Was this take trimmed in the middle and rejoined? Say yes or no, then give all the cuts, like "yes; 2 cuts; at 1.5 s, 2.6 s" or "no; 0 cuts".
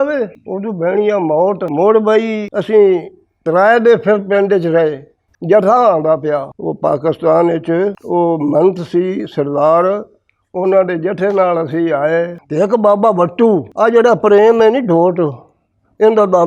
yes; 2 cuts; at 5.4 s, 12.4 s